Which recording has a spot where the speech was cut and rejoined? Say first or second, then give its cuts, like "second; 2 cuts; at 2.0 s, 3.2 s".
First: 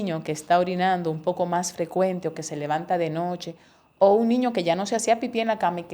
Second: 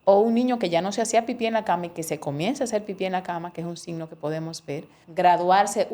second; 1 cut; at 5.0 s